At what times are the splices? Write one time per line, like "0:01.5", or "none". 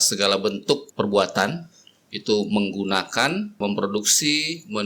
0:00.9
0:03.6